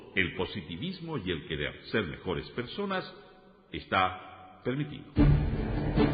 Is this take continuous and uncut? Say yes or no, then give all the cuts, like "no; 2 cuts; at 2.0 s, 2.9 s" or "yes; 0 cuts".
no; 1 cut; at 5.1 s